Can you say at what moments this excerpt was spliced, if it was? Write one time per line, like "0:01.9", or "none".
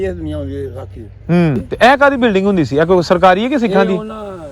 0:01.7